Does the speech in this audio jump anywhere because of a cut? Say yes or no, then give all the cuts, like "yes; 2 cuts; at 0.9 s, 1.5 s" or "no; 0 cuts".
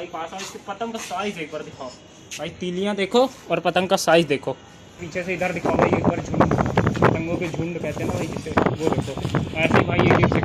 yes; 1 cut; at 5.0 s